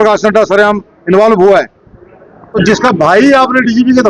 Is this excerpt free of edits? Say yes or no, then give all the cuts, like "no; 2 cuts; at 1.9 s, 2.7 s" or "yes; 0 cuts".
no; 1 cut; at 2.5 s